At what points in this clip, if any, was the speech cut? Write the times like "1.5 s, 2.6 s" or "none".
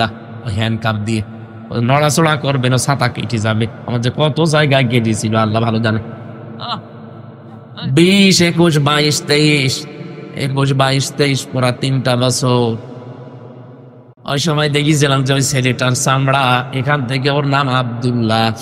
14.1 s